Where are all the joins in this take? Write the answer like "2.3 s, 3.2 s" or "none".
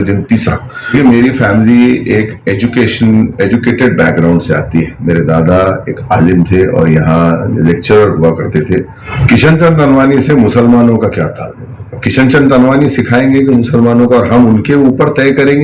0.9 s, 9.0 s